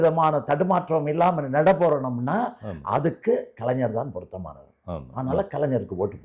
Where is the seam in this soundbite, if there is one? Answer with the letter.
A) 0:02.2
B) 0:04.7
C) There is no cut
C